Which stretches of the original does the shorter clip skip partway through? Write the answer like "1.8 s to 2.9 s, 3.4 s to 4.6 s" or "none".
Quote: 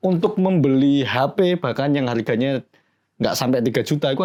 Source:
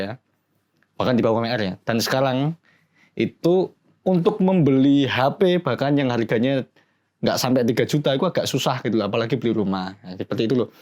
none